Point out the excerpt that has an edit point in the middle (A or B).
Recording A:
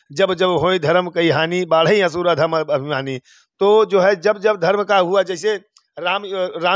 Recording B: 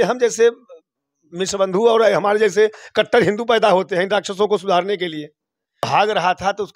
B